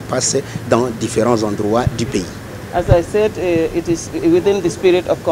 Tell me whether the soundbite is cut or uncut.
uncut